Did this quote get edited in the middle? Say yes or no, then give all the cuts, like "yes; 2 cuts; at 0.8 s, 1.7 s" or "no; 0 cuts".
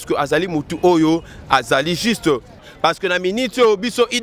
yes; 1 cut; at 2.6 s